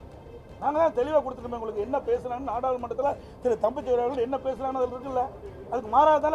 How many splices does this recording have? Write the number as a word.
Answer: zero